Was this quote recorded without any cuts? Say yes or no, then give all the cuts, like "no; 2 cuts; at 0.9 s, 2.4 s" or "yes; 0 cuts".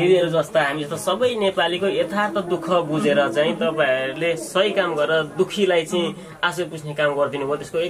yes; 0 cuts